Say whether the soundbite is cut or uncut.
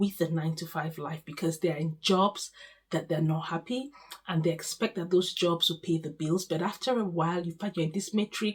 uncut